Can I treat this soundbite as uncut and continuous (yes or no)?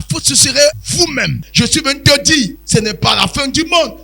no